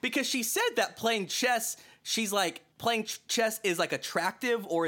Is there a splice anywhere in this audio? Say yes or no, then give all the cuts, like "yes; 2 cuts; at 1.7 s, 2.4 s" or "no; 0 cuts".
no; 0 cuts